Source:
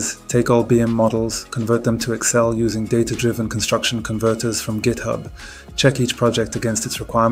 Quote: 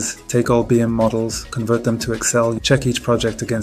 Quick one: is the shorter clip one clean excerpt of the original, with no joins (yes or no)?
no